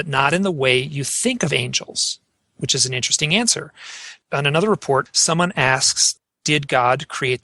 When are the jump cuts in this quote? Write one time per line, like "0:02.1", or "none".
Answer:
0:04.2
0:05.1
0:06.0